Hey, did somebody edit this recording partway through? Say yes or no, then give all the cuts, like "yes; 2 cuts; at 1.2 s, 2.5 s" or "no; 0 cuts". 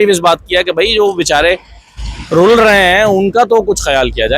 no; 0 cuts